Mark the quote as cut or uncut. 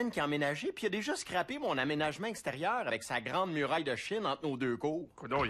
uncut